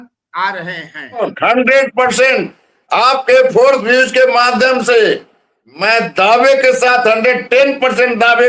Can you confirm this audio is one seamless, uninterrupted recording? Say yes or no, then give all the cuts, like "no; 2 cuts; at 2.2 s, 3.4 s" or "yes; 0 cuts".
no; 1 cut; at 1.2 s